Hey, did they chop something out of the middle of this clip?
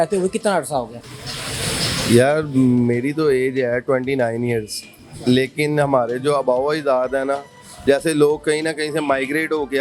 no; 0 cuts

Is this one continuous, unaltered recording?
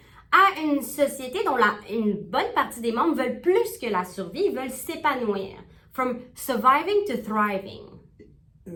yes; 0 cuts

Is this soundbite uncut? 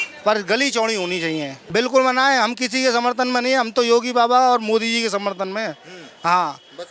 no; 1 cut; at 1.5 s

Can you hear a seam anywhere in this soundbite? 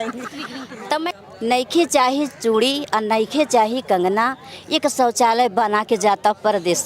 yes; 1 cut; at 1.1 s

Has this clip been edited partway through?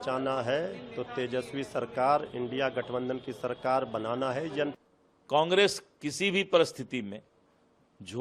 yes; 1 cut; at 4.7 s

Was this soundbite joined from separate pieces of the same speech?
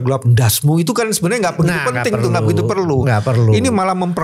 no; 0 cuts

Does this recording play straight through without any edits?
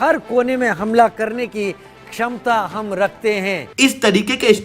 no; 1 cut; at 3.6 s

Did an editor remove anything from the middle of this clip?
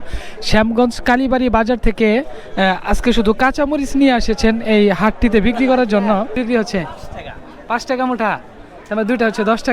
yes; 1 cut; at 6.4 s

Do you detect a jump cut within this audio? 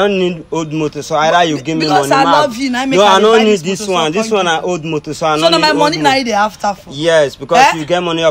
no; 0 cuts

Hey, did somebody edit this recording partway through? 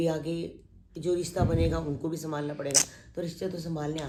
no; 0 cuts

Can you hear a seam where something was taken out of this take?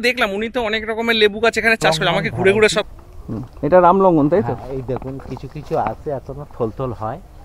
yes; 1 cut; at 2.9 s

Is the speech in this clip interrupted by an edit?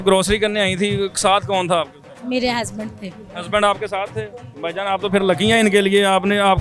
no; 0 cuts

